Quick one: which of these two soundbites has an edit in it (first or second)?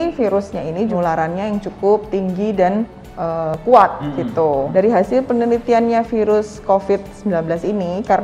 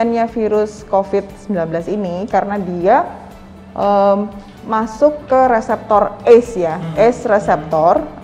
first